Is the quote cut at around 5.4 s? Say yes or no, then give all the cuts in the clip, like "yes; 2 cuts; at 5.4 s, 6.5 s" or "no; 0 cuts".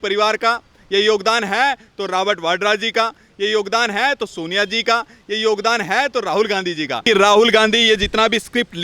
no; 1 cut; at 7.0 s